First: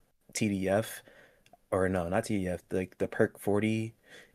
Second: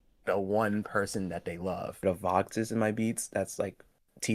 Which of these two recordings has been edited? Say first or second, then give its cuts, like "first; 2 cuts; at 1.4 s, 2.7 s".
second; 1 cut; at 2.0 s